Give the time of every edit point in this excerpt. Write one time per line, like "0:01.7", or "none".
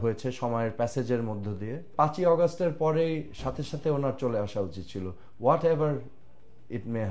0:01.9